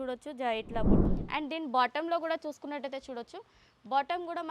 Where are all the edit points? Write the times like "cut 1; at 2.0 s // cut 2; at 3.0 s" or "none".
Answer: cut 1; at 1.1 s